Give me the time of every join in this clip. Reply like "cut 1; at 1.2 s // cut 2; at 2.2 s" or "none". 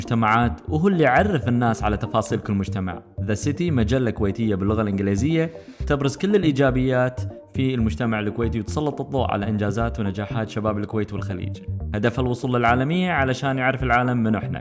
none